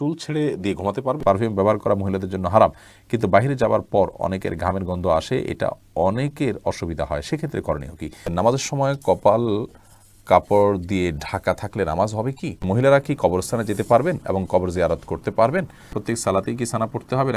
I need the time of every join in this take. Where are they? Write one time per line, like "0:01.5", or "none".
0:01.2
0:08.3
0:12.6
0:15.9